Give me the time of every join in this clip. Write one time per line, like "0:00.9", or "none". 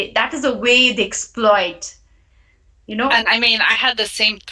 none